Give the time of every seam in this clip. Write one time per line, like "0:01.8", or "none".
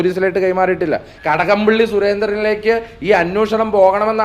0:01.1